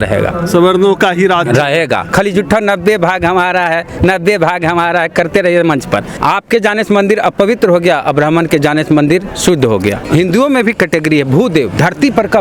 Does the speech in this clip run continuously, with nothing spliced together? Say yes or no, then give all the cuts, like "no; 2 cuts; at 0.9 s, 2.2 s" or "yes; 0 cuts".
no; 3 cuts; at 2.1 s, 6.1 s, 10.0 s